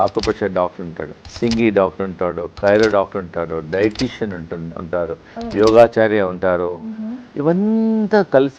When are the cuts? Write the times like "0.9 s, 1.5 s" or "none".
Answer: 1.0 s